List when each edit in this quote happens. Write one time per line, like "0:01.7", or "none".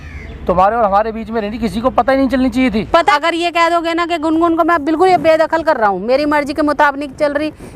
0:03.2